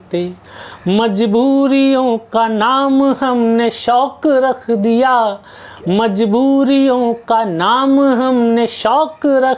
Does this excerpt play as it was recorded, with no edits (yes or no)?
yes